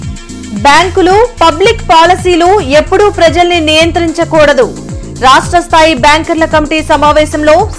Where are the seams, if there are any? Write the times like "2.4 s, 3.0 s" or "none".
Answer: none